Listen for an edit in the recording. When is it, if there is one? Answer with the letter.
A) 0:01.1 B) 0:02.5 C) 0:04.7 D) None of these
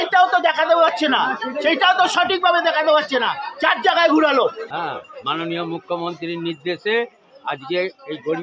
C